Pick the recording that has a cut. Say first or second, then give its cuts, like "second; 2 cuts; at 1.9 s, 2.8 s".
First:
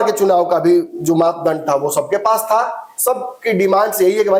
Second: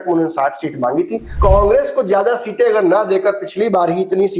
second; 1 cut; at 1.3 s